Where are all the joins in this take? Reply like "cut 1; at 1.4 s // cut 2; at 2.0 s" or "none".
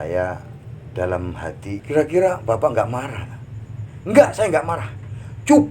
cut 1; at 1.8 s